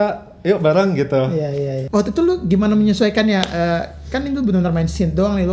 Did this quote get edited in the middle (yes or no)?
yes